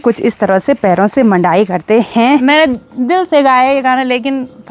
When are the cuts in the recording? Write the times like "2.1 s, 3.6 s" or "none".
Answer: 2.4 s